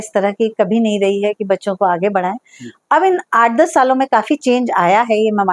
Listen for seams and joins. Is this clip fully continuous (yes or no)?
yes